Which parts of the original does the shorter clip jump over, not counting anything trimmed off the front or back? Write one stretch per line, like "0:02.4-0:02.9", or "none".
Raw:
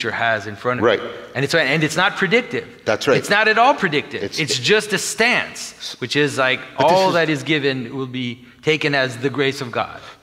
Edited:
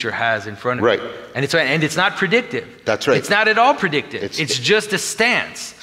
none